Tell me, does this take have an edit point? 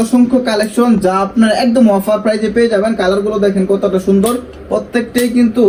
no; 0 cuts

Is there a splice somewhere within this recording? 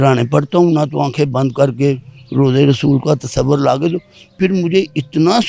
no; 0 cuts

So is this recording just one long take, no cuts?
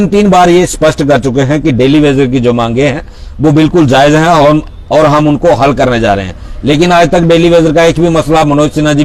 no; 1 cut; at 4.2 s

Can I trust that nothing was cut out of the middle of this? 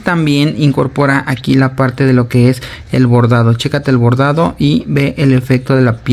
yes; 0 cuts

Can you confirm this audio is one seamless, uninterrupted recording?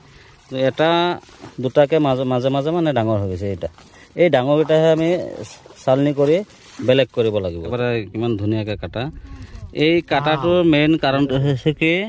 no; 1 cut; at 7.7 s

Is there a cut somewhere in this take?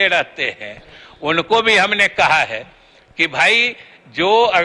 no; 0 cuts

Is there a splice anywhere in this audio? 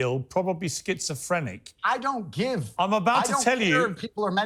no; 0 cuts

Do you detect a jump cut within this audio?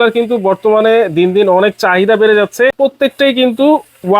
yes; 1 cut; at 2.8 s

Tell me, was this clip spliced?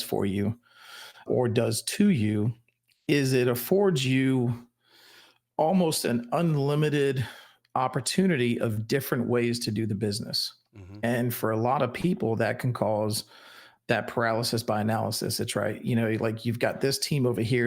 yes; 1 cut; at 1.2 s

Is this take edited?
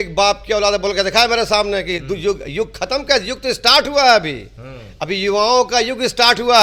no; 0 cuts

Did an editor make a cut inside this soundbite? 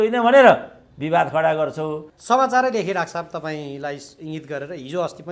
yes; 1 cut; at 2.1 s

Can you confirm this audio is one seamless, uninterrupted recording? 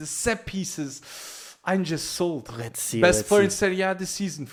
yes; 0 cuts

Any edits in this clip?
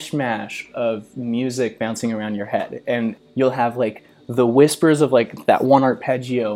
yes; 1 cut; at 3.2 s

